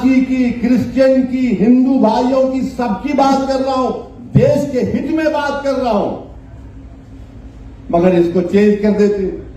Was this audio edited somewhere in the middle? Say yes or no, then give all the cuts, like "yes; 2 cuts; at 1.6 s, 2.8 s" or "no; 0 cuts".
no; 0 cuts